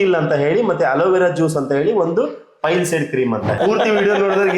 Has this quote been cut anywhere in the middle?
yes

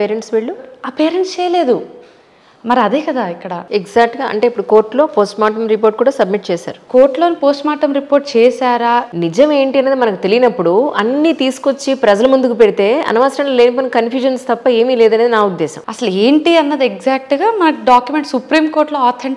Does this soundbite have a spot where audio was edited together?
yes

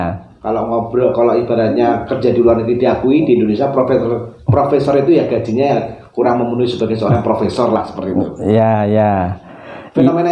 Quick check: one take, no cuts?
yes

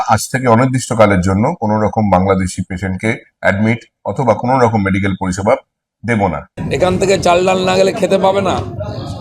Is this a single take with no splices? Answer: no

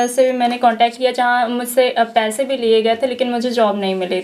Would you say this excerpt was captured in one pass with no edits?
yes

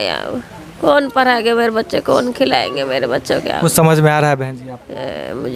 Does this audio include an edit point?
no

